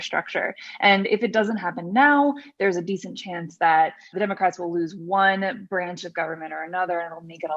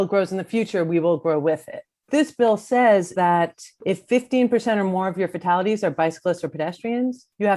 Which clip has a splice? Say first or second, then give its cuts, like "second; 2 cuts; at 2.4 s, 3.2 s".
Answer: second; 2 cuts; at 2.1 s, 3.1 s